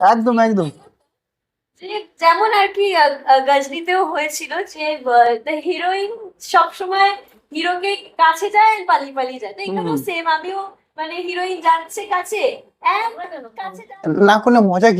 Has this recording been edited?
yes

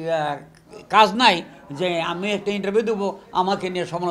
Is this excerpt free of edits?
yes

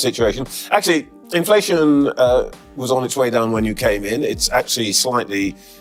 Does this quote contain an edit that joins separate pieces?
no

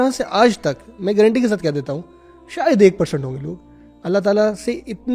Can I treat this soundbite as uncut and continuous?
yes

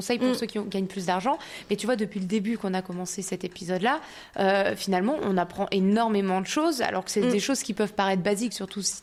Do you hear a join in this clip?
no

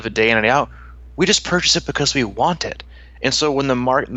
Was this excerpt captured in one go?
yes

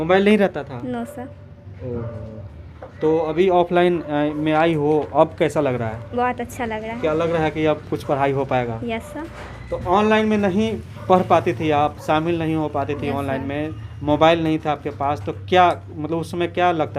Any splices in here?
no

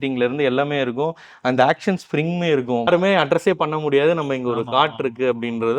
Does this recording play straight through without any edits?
no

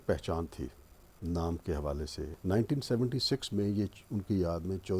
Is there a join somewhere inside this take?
yes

